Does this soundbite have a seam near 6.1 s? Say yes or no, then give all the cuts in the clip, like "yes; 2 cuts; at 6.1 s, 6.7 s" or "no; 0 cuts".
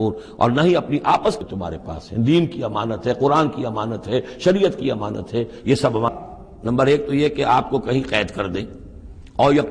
yes; 2 cuts; at 1.4 s, 6.1 s